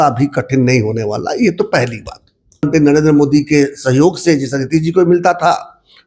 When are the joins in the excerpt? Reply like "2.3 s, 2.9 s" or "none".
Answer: 2.7 s